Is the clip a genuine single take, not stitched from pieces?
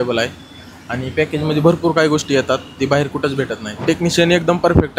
no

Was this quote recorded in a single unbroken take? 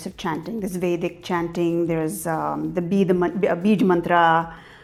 yes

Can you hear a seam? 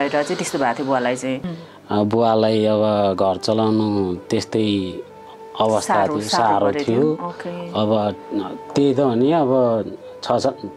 yes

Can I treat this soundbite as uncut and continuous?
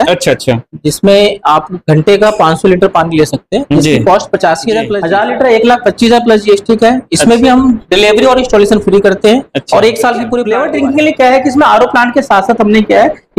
no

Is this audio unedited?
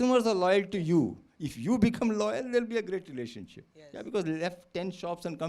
yes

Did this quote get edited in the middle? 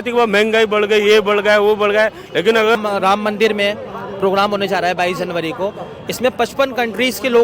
yes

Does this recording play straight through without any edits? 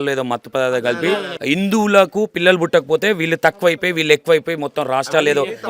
no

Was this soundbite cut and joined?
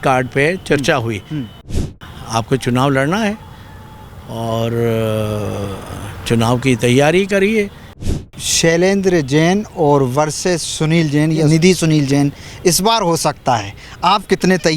yes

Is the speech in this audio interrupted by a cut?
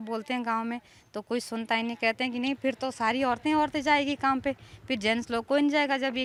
no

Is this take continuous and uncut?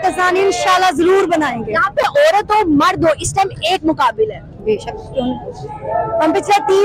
yes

